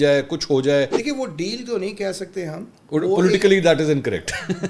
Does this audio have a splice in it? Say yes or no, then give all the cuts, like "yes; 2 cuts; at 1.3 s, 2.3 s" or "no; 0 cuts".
yes; 1 cut; at 1.0 s